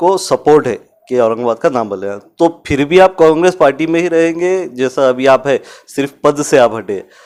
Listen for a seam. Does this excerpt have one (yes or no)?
no